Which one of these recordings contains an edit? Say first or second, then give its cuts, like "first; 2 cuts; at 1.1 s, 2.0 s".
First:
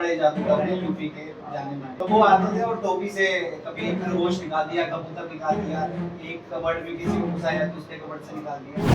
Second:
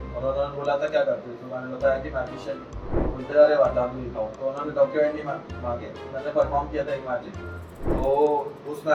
first; 1 cut; at 1.9 s